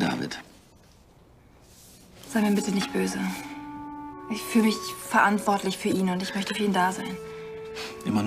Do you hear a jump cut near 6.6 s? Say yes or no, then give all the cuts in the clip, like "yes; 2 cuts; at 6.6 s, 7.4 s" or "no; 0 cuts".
no; 1 cut; at 2.8 s